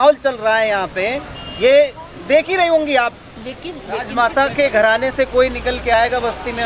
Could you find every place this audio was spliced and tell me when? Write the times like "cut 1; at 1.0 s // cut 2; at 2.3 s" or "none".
cut 1; at 4.1 s

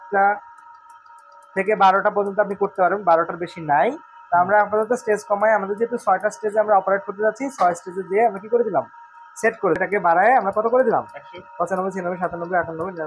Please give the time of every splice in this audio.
cut 1; at 9.8 s

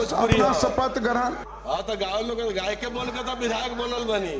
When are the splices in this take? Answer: cut 1; at 1.4 s

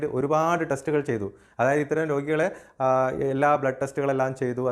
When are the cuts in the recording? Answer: none

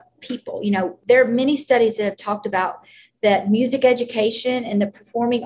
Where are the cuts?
cut 1; at 1.0 s

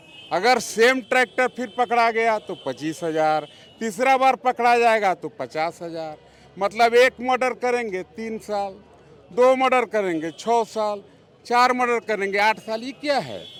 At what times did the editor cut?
none

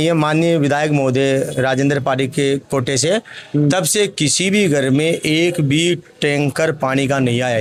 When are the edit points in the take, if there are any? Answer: none

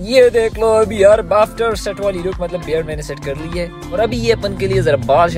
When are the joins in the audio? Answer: none

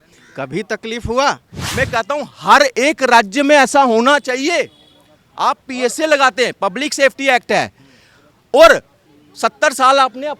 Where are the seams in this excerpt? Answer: cut 1; at 1.6 s

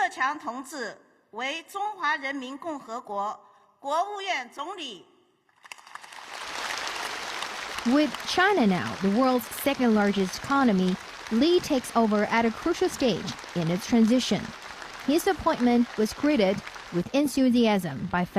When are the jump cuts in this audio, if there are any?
cut 1; at 5.6 s

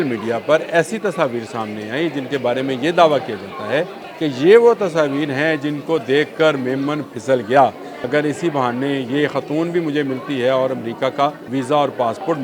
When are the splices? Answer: cut 1; at 4.0 s // cut 2; at 7.9 s // cut 3; at 11.4 s

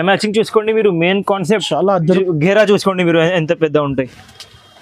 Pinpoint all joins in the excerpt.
cut 1; at 2.2 s

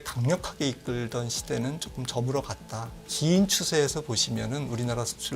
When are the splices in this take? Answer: cut 1; at 3.1 s

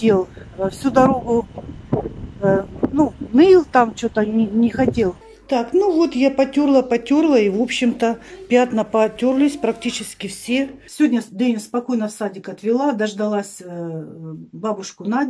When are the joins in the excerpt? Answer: cut 1; at 5.2 s // cut 2; at 10.8 s

